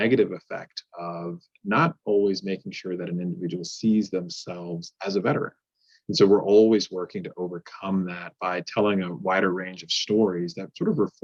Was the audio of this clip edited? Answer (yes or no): no